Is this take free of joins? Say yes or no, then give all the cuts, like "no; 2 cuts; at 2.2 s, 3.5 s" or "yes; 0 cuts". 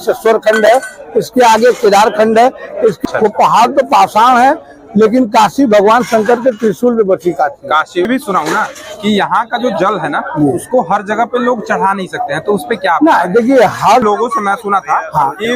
no; 3 cuts; at 3.0 s, 8.1 s, 14.0 s